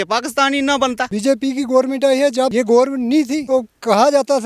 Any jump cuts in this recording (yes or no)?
yes